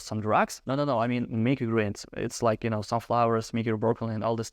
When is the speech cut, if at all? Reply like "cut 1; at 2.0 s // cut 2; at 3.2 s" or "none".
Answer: none

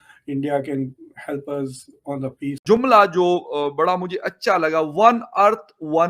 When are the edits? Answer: cut 1; at 2.8 s

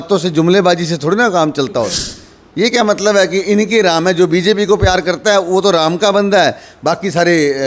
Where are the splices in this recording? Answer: cut 1; at 2.1 s

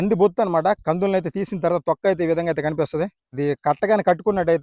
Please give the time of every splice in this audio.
cut 1; at 3.4 s

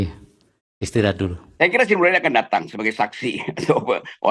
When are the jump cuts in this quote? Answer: cut 1; at 1.5 s

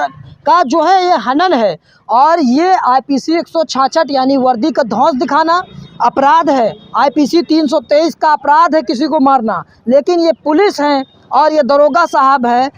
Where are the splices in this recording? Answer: none

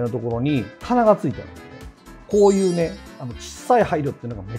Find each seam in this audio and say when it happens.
none

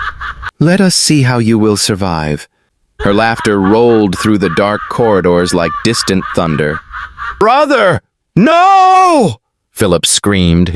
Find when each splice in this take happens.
cut 1; at 7.4 s

